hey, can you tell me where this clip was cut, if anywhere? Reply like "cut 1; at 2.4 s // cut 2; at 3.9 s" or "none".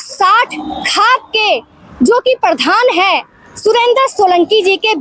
none

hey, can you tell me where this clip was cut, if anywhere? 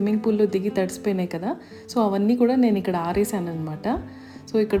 none

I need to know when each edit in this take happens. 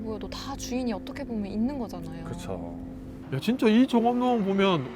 cut 1; at 3.2 s

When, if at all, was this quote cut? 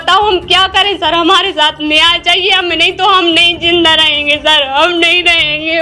none

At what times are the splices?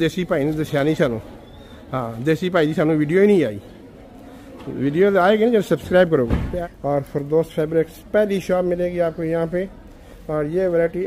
cut 1; at 6.5 s

